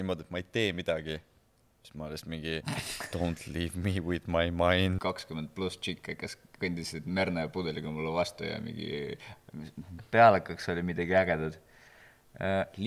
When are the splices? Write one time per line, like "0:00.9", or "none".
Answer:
0:02.6
0:05.0